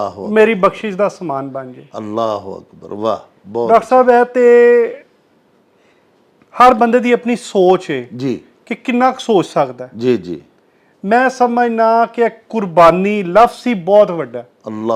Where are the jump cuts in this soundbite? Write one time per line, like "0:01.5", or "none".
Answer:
none